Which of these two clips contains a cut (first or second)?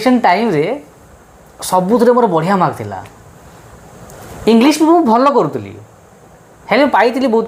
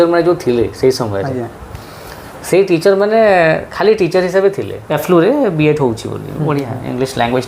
second